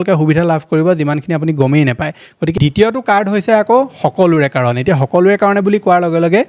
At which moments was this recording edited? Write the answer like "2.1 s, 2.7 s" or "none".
2.5 s